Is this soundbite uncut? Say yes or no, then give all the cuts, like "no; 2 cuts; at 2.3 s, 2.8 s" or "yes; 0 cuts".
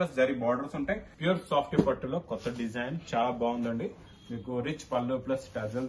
no; 1 cut; at 1.1 s